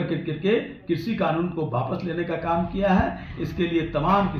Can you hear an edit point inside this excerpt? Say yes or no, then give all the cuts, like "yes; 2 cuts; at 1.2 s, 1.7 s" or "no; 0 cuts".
no; 0 cuts